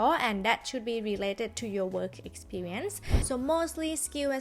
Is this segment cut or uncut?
cut